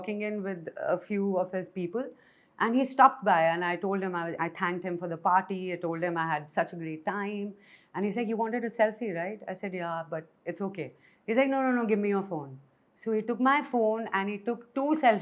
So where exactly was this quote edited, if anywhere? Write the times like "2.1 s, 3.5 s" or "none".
none